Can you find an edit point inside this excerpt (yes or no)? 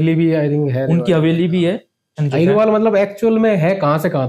yes